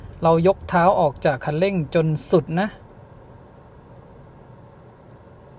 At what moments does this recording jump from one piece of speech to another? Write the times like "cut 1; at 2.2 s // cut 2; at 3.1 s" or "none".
none